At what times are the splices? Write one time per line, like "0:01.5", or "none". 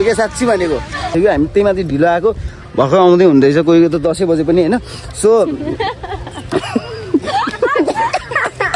0:01.1